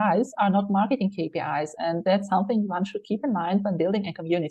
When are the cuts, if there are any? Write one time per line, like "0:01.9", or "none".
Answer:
none